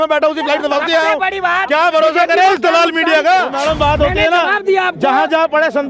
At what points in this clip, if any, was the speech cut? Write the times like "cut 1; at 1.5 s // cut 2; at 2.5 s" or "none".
cut 1; at 3.6 s